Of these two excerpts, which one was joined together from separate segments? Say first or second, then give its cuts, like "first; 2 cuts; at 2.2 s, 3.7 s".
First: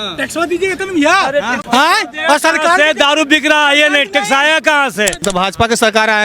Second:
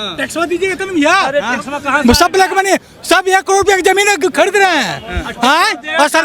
first; 2 cuts; at 1.6 s, 5.2 s